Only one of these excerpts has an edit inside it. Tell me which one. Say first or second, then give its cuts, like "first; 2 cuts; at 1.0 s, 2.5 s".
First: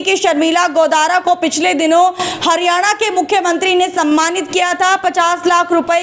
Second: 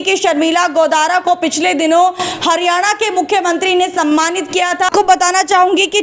second; 1 cut; at 4.9 s